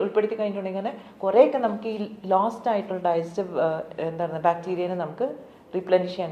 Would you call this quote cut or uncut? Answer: uncut